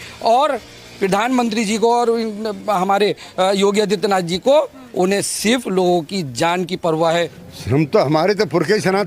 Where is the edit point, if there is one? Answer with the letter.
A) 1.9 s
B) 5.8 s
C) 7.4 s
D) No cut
C